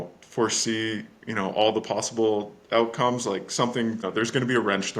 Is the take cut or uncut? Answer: cut